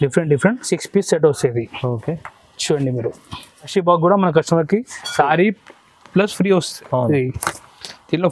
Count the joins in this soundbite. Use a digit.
1